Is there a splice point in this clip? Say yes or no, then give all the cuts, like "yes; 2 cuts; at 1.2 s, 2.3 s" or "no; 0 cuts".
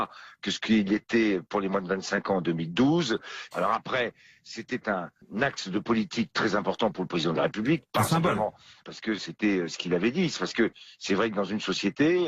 yes; 1 cut; at 1.1 s